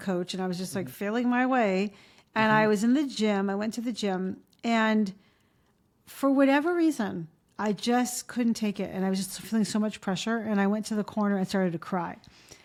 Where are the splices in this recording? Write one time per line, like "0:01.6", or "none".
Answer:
none